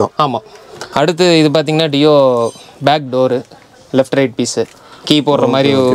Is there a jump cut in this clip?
yes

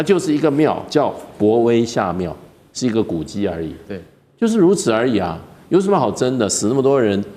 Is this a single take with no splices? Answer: yes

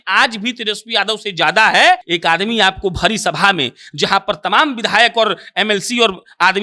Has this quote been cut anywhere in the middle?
yes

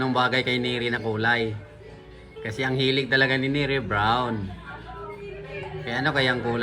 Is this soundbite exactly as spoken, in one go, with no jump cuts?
yes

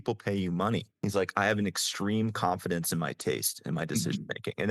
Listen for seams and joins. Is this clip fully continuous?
no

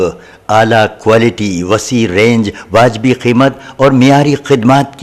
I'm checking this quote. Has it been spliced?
no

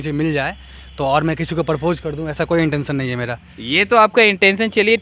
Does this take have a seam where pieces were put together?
no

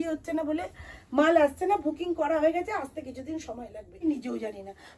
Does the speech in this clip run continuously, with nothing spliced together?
no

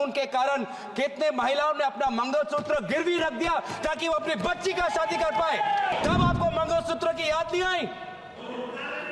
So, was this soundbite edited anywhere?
yes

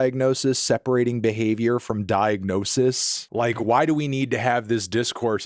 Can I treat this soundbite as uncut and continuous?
yes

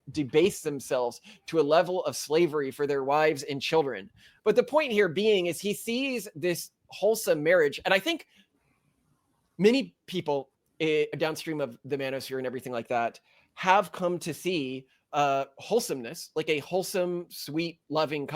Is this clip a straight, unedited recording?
no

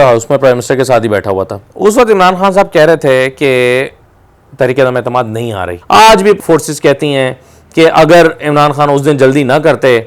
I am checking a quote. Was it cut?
yes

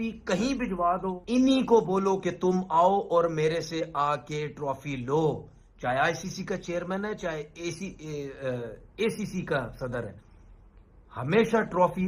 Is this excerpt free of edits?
no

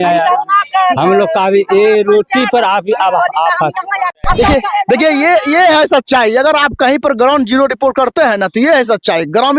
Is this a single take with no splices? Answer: no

